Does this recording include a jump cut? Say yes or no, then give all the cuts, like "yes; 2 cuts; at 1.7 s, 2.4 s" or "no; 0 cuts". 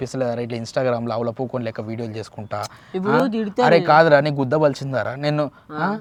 no; 0 cuts